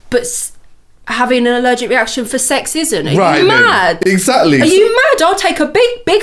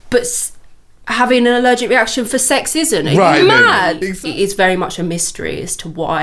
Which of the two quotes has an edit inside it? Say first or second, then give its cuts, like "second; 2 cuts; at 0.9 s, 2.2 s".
second; 1 cut; at 4.0 s